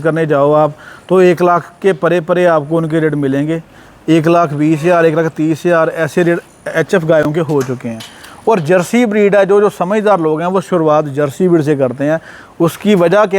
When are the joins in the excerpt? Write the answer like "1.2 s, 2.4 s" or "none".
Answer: none